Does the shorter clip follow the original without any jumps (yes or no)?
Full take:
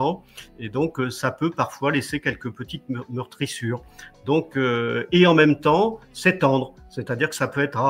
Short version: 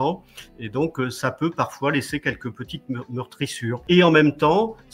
no